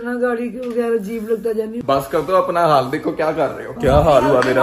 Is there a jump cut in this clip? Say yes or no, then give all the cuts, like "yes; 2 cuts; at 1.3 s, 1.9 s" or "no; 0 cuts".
yes; 1 cut; at 1.8 s